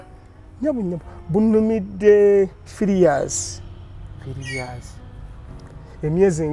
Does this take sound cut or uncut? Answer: uncut